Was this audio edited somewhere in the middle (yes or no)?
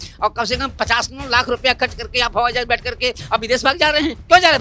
no